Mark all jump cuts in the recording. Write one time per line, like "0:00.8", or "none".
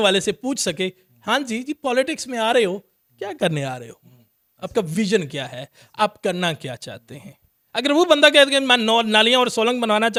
none